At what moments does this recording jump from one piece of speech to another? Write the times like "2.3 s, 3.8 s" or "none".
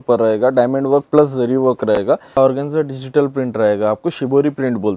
2.4 s